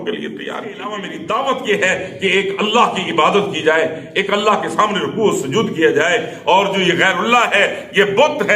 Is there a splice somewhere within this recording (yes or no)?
yes